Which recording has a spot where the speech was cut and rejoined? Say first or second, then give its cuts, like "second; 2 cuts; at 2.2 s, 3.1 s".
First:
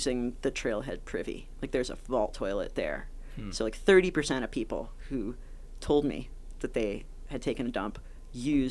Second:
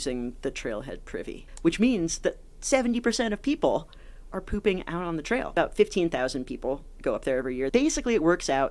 second; 3 cuts; at 1.4 s, 5.5 s, 7.7 s